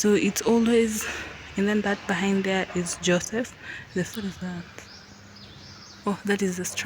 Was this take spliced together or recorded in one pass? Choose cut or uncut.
cut